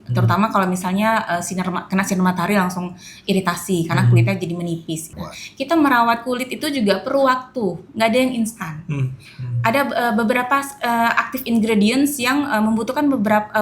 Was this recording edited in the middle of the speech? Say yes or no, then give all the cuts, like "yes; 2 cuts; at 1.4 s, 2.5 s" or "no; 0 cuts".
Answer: yes; 1 cut; at 5.2 s